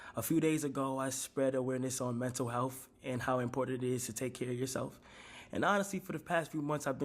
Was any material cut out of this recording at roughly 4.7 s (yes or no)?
yes